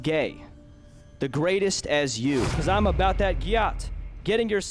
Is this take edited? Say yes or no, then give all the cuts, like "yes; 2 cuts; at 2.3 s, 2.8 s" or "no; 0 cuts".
yes; 1 cut; at 2.5 s